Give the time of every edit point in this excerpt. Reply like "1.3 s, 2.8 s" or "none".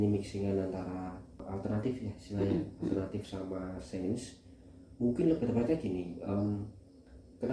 1.4 s